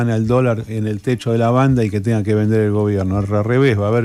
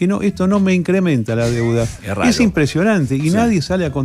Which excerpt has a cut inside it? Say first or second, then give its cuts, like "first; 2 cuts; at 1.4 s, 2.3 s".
second; 1 cut; at 2.0 s